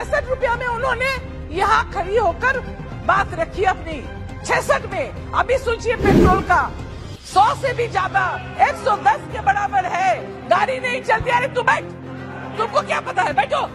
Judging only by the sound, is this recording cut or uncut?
uncut